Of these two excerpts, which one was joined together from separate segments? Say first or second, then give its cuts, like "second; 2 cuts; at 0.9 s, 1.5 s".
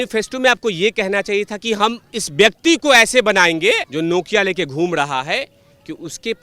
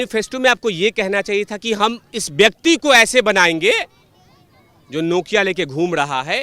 first; 1 cut; at 3.9 s